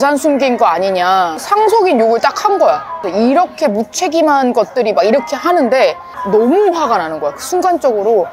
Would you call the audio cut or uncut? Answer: cut